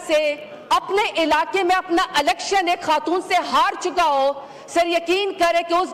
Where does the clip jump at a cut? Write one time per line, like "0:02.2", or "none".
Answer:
none